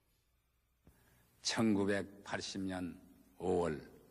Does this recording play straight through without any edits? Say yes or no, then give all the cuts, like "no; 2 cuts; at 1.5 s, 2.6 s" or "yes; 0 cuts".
no; 1 cut; at 2.1 s